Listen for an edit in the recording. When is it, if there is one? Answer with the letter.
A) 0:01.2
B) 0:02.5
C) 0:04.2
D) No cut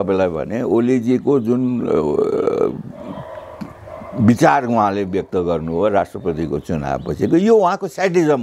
D